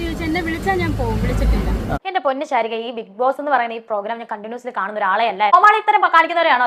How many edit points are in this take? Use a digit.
2